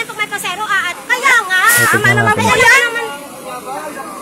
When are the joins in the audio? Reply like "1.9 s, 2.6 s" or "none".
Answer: none